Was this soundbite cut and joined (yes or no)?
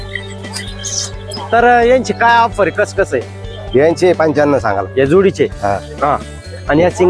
no